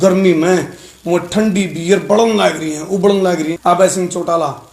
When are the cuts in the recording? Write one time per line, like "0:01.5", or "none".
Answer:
0:03.5